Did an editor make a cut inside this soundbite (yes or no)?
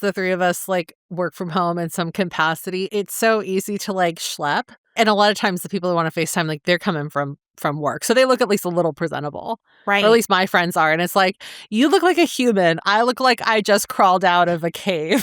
yes